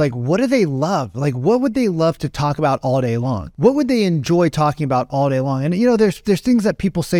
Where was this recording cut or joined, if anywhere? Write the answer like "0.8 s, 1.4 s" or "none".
none